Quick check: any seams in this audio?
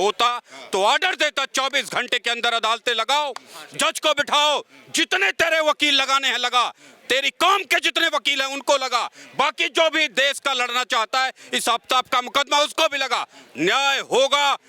no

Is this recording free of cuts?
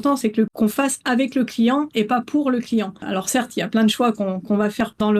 yes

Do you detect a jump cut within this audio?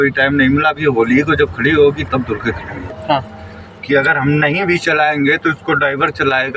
yes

